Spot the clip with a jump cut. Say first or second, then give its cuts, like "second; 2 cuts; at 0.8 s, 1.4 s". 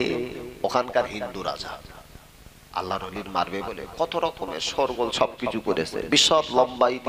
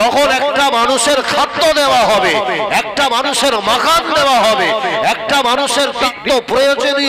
second; 1 cut; at 6.1 s